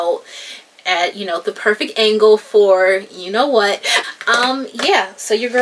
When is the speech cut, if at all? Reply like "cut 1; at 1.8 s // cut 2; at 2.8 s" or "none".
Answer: cut 1; at 4.0 s

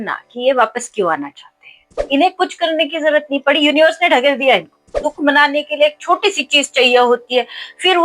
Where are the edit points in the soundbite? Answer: cut 1; at 2.0 s // cut 2; at 5.0 s

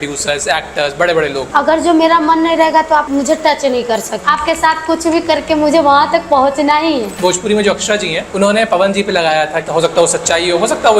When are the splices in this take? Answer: cut 1; at 1.5 s // cut 2; at 3.1 s // cut 3; at 4.1 s // cut 4; at 7.1 s // cut 5; at 8.2 s // cut 6; at 9.7 s

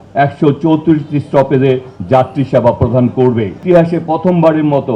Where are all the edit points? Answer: cut 1; at 3.6 s

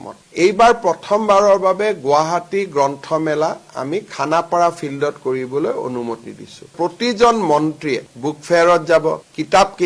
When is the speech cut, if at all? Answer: cut 1; at 6.7 s

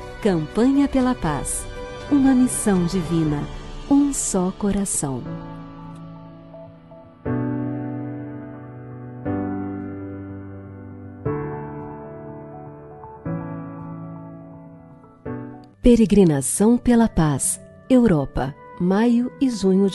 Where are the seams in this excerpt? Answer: cut 1; at 15.7 s

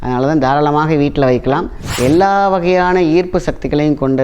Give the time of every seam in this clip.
cut 1; at 1.8 s

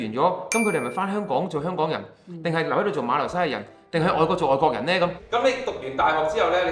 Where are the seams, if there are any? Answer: cut 1; at 5.2 s

